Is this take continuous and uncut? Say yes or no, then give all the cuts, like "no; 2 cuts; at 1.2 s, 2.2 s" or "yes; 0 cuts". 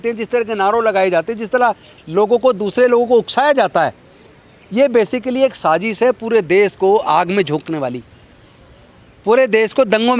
yes; 0 cuts